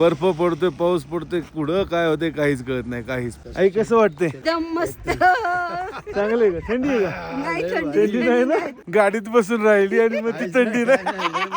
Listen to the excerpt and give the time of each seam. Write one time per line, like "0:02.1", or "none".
0:03.4
0:04.4
0:08.8